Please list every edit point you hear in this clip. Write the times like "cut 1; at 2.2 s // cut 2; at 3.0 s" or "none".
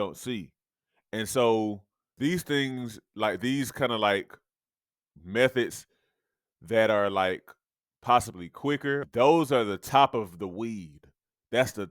cut 1; at 2.1 s // cut 2; at 9.0 s